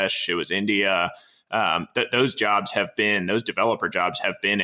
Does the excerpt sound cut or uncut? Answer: uncut